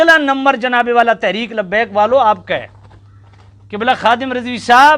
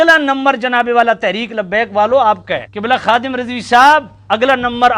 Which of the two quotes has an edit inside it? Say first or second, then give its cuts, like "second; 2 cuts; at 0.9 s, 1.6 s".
second; 2 cuts; at 2.7 s, 4.1 s